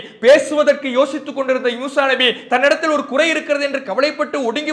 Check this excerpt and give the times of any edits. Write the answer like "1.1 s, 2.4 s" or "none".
none